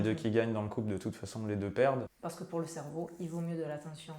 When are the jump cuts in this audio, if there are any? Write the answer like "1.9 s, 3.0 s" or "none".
2.1 s